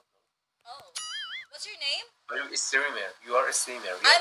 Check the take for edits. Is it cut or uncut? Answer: uncut